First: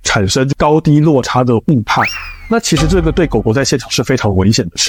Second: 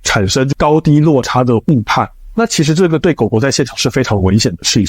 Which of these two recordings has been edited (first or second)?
second